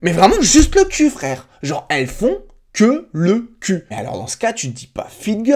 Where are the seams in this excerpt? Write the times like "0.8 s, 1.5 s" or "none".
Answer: 3.9 s